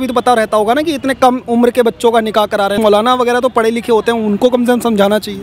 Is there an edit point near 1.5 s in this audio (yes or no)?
no